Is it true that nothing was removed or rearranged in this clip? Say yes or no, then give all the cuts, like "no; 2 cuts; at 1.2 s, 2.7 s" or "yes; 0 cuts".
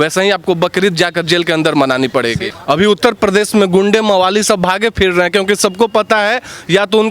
no; 1 cut; at 2.5 s